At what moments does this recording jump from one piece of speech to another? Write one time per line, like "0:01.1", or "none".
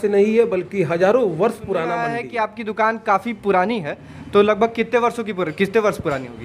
0:02.0